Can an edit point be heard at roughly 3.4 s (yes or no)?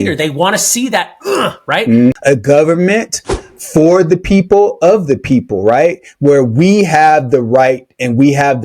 no